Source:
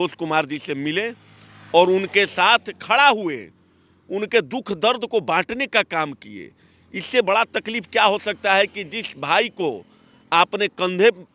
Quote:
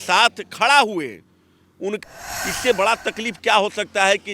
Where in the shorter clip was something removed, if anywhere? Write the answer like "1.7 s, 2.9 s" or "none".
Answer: 2.0 s